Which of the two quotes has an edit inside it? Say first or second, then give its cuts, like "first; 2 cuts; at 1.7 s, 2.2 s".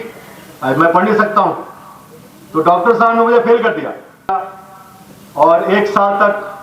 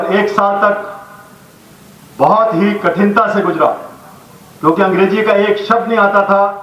first; 1 cut; at 4.5 s